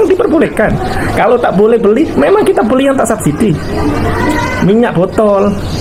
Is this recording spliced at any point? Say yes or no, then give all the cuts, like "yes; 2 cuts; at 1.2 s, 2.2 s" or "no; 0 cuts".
no; 0 cuts